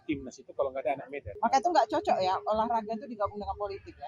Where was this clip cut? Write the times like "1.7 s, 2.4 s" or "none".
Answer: 1.3 s